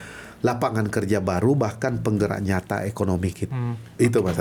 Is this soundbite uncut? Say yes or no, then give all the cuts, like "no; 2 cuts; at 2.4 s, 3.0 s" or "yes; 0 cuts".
yes; 0 cuts